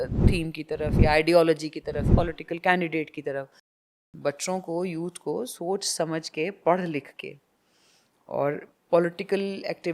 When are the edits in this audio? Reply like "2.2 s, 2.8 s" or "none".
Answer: 2.0 s, 3.9 s